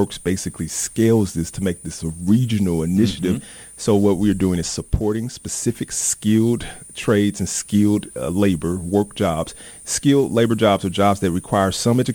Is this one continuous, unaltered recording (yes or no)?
yes